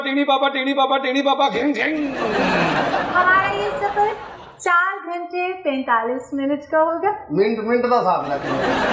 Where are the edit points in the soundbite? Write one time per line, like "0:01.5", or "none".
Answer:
0:03.1